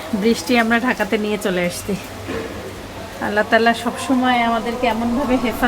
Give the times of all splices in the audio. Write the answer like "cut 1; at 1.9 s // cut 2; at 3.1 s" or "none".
none